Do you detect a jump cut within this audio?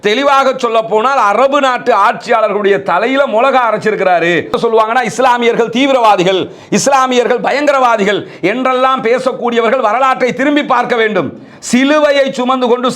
yes; 1 cut; at 4.5 s

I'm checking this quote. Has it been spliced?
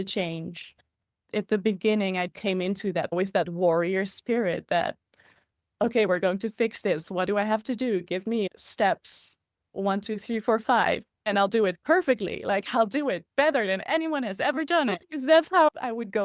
yes; 1 cut; at 3.1 s

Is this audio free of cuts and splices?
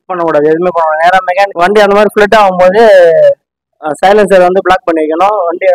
no; 1 cut; at 1.5 s

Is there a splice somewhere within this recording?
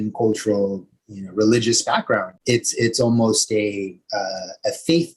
yes; 1 cut; at 2.4 s

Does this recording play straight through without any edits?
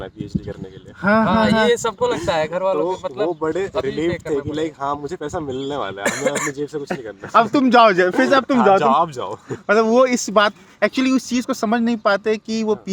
yes; 0 cuts

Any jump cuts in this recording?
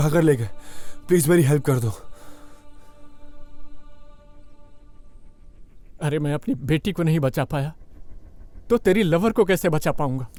no; 0 cuts

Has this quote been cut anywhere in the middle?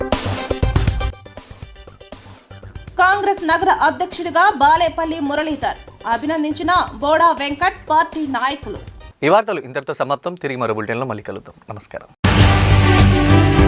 no; 0 cuts

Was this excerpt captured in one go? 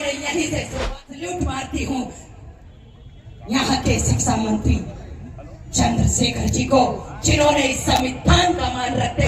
no; 1 cut; at 1.2 s

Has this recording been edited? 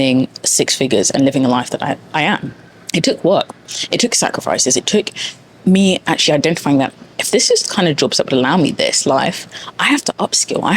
no; 0 cuts

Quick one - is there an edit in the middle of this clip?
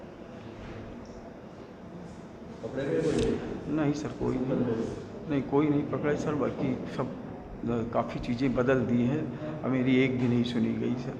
no; 0 cuts

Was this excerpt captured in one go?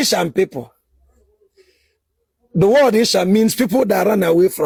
yes; 0 cuts

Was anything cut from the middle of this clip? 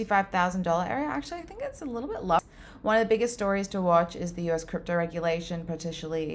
yes; 1 cut; at 2.4 s

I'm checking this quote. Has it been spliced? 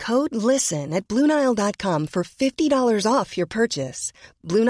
no; 0 cuts

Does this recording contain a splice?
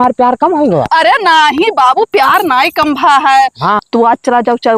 yes; 1 cut; at 3.8 s

